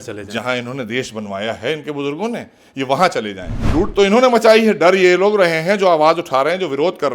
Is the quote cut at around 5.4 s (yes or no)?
no